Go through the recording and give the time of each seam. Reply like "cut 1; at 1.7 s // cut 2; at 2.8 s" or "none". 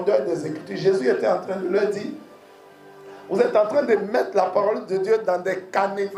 none